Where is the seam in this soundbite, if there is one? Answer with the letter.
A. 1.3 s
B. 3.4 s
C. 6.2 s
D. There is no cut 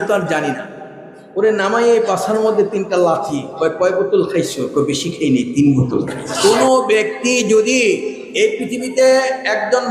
C